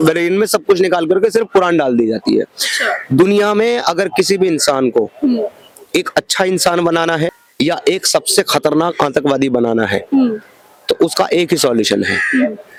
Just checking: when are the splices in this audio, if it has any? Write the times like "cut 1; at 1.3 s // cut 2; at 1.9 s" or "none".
none